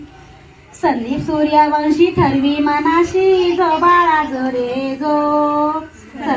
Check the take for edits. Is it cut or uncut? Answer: uncut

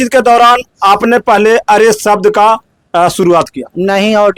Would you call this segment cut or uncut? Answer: uncut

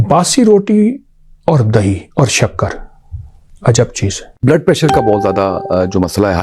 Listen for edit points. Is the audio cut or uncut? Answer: cut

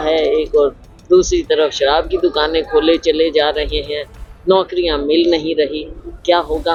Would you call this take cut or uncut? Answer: uncut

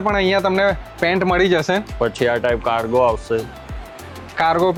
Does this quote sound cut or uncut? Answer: uncut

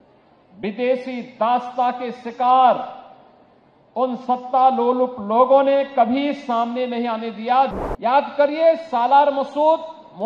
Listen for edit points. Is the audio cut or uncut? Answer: cut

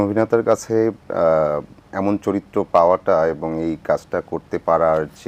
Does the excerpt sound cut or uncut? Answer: uncut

